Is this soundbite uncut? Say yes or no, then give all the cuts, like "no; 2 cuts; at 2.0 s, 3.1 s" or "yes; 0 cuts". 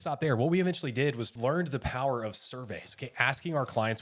no; 1 cut; at 1.3 s